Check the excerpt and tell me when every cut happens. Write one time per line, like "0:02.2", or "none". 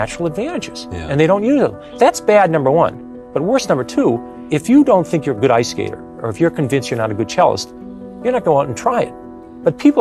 0:01.8
0:04.3

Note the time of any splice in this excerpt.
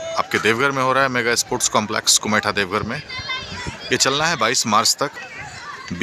0:05.1

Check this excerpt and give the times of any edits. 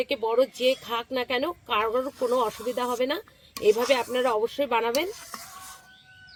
none

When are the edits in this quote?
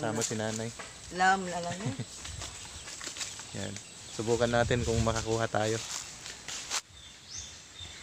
0:06.8

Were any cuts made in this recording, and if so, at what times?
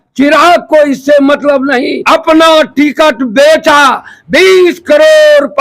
0:02.0

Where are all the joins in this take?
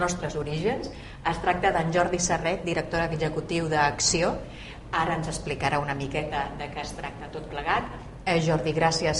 none

